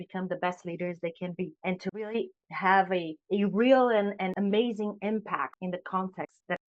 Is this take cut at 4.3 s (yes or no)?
yes